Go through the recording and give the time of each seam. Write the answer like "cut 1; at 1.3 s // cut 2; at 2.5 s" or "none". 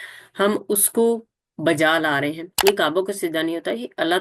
cut 1; at 2.5 s